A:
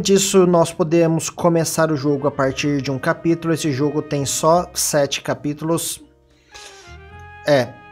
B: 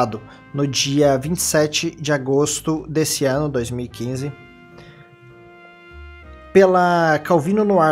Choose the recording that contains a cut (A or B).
B